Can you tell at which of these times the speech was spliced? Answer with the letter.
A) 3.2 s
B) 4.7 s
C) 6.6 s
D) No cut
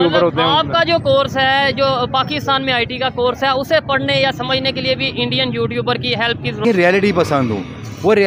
C